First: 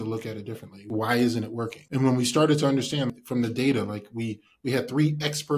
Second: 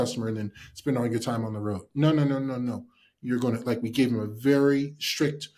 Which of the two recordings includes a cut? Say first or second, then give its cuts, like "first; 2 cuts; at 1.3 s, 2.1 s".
first; 3 cuts; at 0.9 s, 1.8 s, 3.2 s